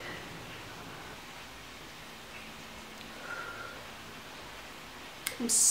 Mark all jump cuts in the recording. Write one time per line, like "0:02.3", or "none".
0:01.1